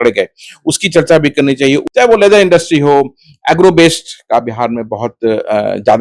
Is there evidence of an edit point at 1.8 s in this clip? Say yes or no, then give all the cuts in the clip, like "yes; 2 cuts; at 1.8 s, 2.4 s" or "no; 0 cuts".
yes; 1 cut; at 1.8 s